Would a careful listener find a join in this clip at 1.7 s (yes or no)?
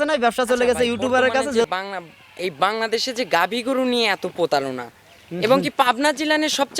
yes